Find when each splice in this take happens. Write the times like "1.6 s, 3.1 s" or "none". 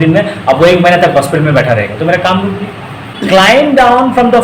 3.1 s

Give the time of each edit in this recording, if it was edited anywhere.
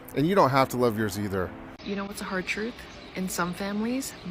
1.7 s

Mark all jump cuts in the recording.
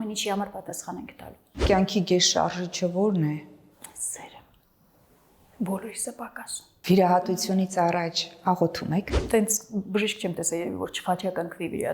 1.6 s, 6.7 s

